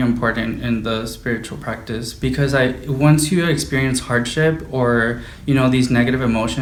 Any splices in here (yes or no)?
no